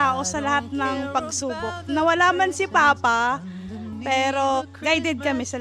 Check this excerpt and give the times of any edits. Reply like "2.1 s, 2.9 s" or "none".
4.6 s